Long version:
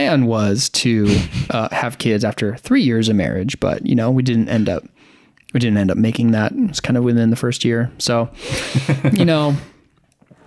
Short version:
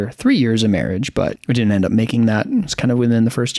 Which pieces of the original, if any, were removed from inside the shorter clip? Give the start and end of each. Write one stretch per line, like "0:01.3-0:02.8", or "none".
0:03.8-0:05.4